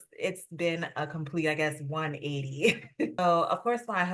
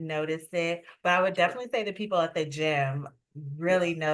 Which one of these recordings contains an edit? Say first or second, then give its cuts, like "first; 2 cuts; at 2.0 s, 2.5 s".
first; 1 cut; at 3.2 s